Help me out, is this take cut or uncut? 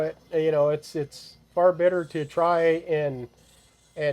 uncut